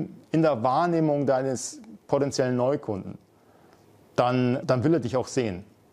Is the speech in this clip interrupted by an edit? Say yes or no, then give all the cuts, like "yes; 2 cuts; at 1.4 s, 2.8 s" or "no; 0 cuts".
yes; 1 cut; at 4.6 s